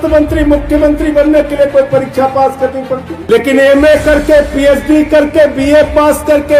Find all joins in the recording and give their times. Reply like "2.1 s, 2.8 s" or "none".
3.1 s